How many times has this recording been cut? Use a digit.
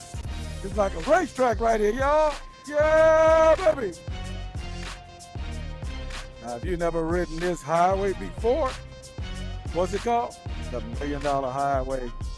1